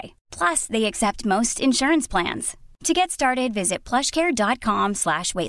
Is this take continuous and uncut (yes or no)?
yes